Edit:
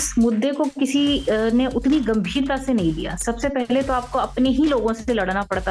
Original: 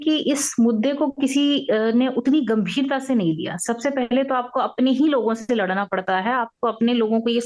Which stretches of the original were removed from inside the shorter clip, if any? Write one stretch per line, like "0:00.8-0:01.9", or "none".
none